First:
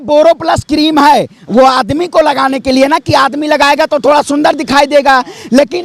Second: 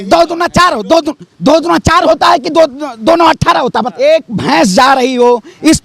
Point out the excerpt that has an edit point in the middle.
second; 1 cut; at 3.9 s

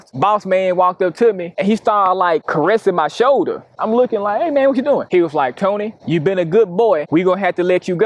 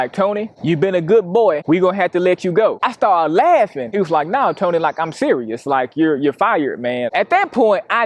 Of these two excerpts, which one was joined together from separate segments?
second; 2 cuts; at 3.8 s, 7.1 s

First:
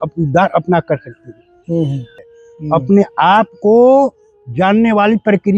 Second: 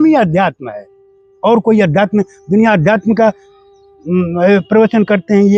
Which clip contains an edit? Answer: first; 1 cut; at 2.1 s

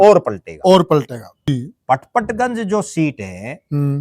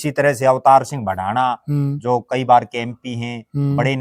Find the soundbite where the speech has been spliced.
first; 1 cut; at 1.5 s

